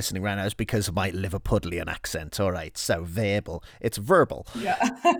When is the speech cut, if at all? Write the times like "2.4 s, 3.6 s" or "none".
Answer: none